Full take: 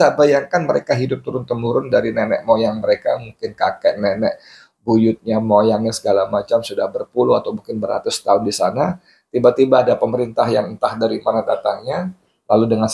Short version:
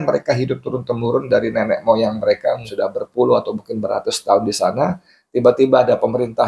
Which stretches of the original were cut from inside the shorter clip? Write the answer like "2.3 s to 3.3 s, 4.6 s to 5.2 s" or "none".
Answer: 3.3 s to 6.7 s